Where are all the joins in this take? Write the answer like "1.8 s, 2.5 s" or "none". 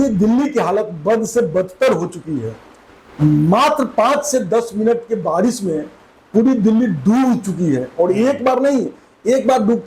none

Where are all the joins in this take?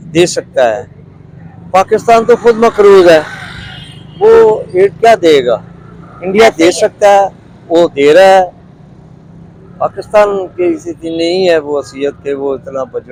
none

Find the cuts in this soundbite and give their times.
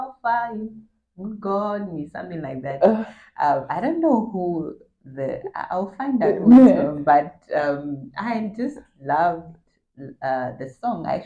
none

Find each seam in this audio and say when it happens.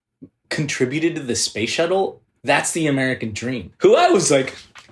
2.2 s, 3.6 s

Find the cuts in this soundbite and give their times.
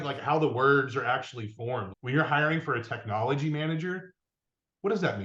1.9 s

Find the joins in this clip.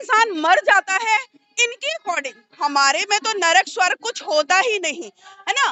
none

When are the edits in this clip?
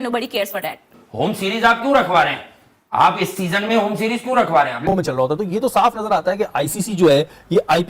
4.9 s

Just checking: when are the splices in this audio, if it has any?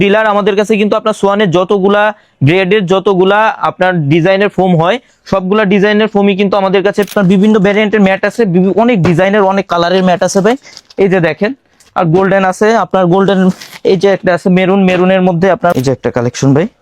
7.1 s, 15.7 s

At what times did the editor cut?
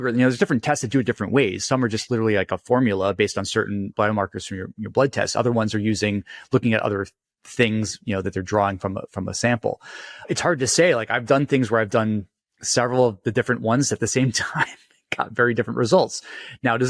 3.9 s, 10.2 s

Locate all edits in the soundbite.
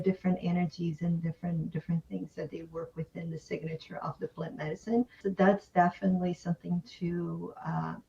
5.2 s

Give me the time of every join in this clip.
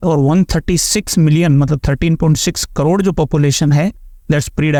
none

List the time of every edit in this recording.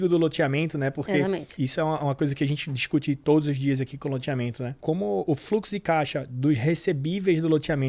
1.5 s, 4.8 s

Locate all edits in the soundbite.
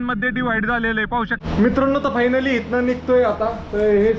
1.4 s

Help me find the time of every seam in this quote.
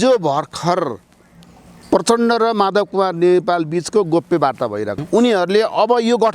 5.0 s

